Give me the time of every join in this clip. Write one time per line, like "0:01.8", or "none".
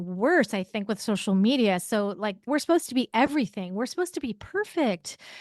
0:02.5